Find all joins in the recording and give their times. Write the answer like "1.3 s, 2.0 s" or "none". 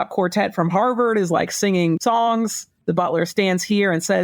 2.0 s, 2.8 s